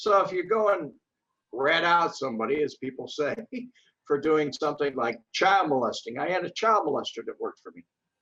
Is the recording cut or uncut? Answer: uncut